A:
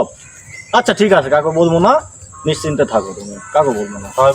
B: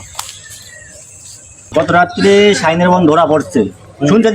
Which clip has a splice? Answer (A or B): B